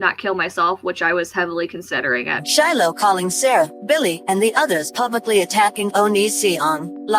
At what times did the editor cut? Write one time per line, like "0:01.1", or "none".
0:02.4